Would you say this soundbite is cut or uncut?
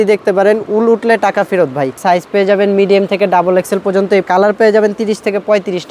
cut